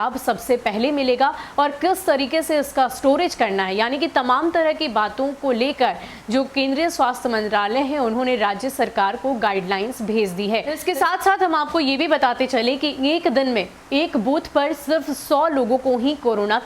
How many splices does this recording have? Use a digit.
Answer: 1